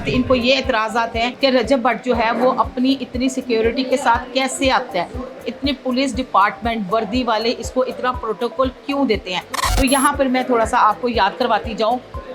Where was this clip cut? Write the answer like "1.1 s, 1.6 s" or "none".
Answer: 1.3 s